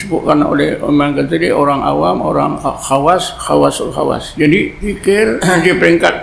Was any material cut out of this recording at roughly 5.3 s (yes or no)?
yes